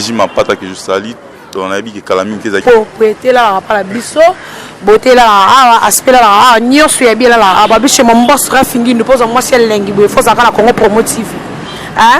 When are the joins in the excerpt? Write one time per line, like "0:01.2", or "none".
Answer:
0:02.6

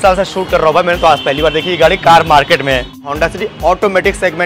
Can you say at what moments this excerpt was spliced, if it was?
0:03.0

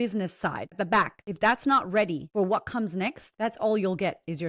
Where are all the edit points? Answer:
0:01.0
0:02.2
0:03.2

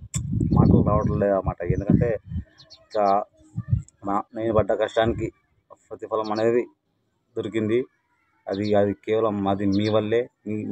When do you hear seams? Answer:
none

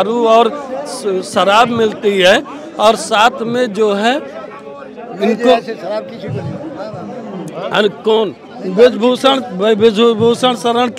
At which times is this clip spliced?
none

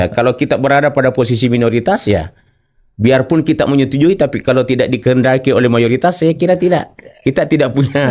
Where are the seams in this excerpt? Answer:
none

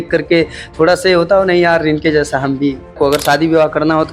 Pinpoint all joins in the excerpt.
0:02.9

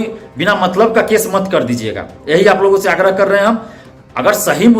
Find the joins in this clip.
none

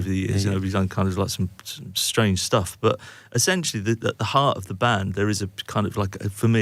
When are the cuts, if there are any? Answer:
none

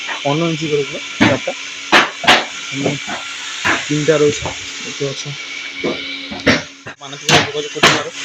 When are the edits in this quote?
0:07.0

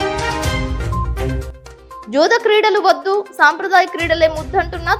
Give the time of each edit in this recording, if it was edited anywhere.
none

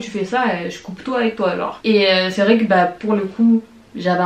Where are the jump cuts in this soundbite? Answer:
none

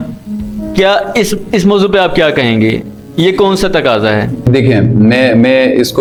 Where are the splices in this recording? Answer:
none

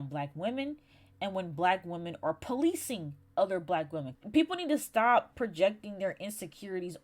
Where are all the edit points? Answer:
0:04.1

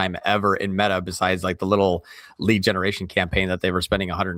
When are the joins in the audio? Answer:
none

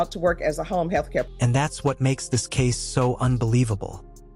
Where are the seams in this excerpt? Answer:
none

